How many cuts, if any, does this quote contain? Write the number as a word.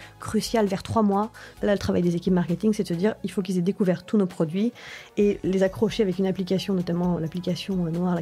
one